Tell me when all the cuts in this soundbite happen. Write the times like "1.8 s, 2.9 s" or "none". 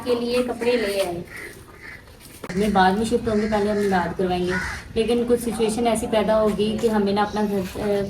2.5 s